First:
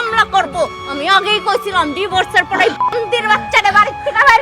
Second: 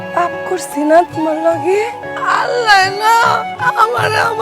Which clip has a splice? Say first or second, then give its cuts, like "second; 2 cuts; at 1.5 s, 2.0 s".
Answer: second; 2 cuts; at 2.0 s, 3.5 s